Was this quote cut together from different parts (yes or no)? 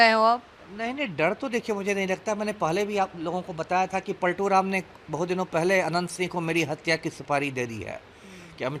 no